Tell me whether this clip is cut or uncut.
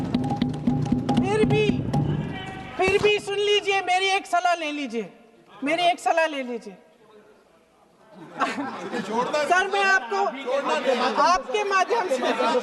uncut